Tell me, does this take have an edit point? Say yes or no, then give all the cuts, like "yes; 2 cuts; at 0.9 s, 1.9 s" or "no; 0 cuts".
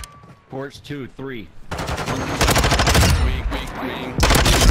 yes; 1 cut; at 1.7 s